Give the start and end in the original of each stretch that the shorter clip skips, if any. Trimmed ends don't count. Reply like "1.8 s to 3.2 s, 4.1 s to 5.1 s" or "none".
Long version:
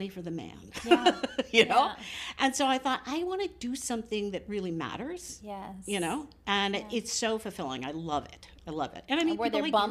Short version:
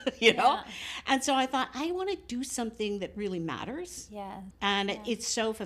5.8 s to 6.3 s